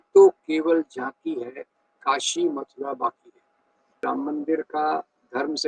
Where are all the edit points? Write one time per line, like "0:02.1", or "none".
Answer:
0:04.0